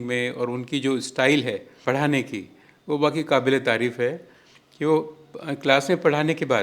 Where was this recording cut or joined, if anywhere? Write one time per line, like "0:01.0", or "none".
0:01.7